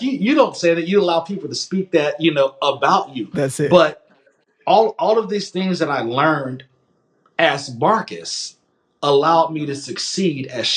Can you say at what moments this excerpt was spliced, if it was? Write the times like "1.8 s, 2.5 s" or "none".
none